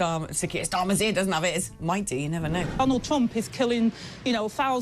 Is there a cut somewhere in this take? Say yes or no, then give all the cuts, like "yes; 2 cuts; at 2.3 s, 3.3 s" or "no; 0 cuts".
yes; 1 cut; at 2.7 s